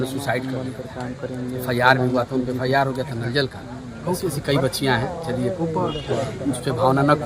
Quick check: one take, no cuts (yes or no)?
no